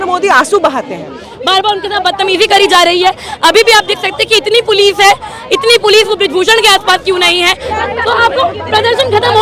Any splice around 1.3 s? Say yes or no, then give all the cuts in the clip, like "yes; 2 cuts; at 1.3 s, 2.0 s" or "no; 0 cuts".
yes; 2 cuts; at 1.3 s, 7.6 s